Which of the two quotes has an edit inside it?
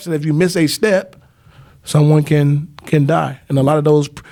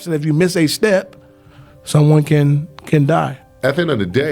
second; 1 cut; at 3.4 s

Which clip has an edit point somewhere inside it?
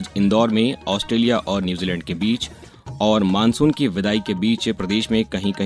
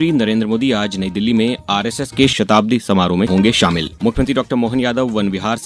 second; 1 cut; at 3.9 s

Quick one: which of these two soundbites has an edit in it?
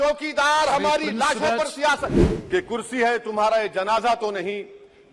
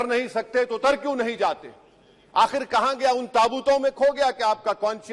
first; 1 cut; at 2.1 s

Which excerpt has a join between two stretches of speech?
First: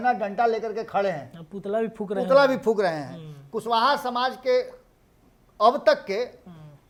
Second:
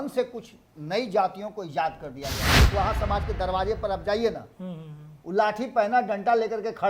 second; 1 cut; at 2.6 s

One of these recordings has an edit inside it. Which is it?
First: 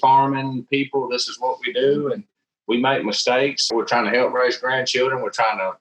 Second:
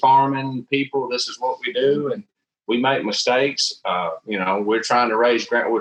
first; 1 cut; at 3.7 s

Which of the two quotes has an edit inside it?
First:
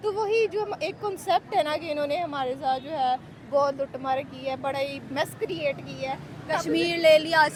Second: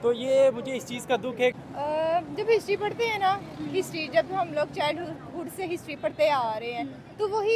second; 1 cut; at 1.5 s

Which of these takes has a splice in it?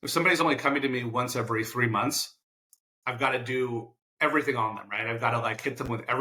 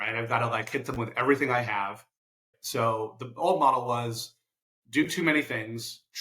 second; 1 cut; at 2.5 s

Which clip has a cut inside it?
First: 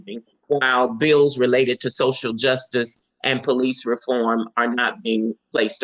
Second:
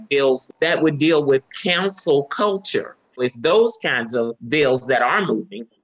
second; 2 cuts; at 3.2 s, 4.4 s

